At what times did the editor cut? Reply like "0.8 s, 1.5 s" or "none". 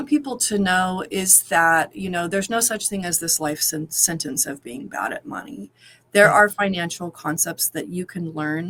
none